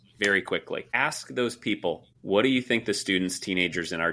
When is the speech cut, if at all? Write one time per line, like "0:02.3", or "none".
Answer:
0:00.9
0:02.1